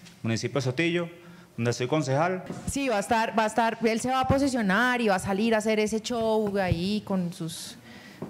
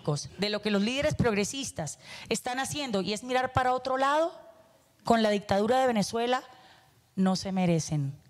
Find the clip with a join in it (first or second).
first